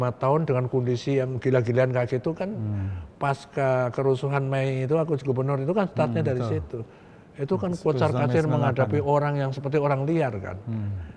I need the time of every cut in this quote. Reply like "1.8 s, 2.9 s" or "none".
none